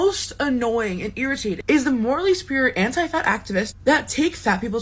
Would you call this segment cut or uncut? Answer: uncut